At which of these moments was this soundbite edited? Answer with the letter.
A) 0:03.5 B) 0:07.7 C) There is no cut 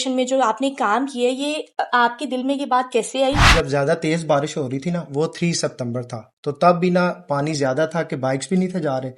A